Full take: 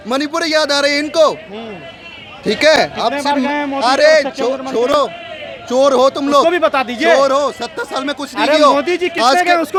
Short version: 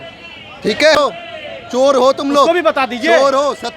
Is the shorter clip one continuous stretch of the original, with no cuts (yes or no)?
no